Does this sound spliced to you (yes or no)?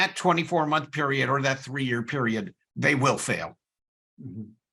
no